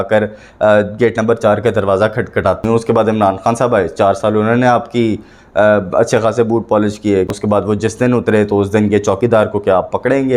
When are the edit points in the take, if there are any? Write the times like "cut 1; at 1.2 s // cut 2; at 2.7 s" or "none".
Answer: cut 1; at 2.6 s // cut 2; at 7.4 s